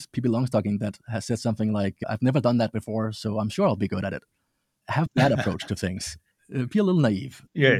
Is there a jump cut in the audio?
yes; 3 cuts; at 1.0 s, 2.0 s, 4.8 s

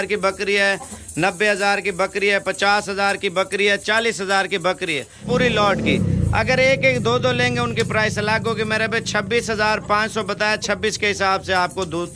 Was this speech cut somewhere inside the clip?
yes; 1 cut; at 5.2 s

